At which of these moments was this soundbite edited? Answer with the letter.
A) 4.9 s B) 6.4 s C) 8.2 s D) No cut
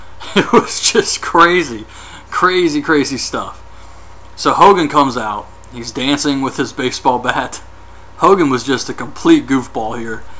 B